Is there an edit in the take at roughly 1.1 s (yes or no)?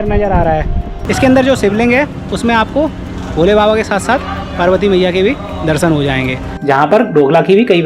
yes